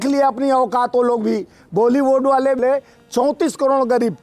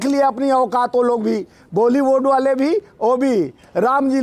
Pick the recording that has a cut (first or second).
first